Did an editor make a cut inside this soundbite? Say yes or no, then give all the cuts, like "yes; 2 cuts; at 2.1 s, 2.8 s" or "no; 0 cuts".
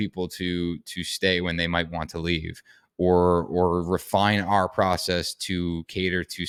no; 0 cuts